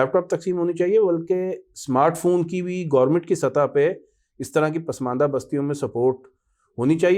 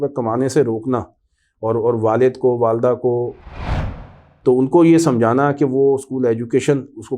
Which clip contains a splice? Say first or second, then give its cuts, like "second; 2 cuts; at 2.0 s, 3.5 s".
second; 1 cut; at 3.9 s